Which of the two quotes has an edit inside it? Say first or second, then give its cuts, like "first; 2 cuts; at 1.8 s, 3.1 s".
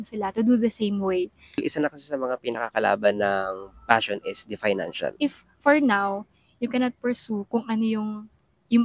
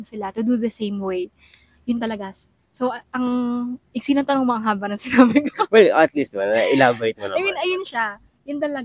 first; 2 cuts; at 1.6 s, 5.1 s